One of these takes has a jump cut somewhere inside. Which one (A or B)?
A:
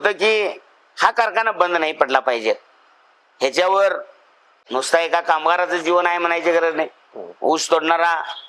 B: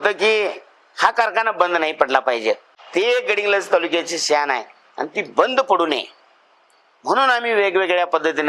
B